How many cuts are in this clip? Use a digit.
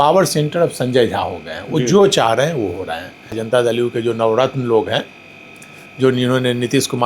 1